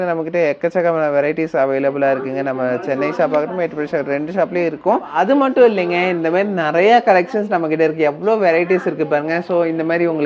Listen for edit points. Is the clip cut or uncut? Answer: cut